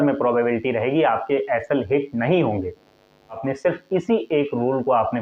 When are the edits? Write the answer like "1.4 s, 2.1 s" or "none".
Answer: 3.4 s